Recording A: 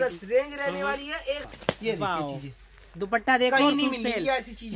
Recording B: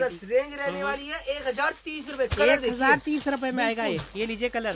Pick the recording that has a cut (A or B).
A